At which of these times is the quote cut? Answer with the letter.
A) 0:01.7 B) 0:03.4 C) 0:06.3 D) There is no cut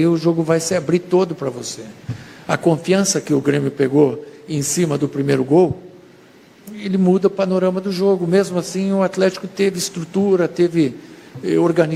D